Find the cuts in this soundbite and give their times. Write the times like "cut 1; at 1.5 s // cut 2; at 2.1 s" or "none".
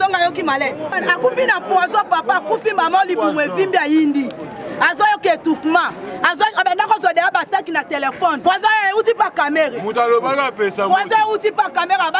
cut 1; at 1.0 s // cut 2; at 8.4 s